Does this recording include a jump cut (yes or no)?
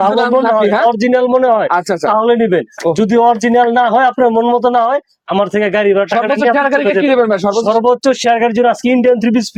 no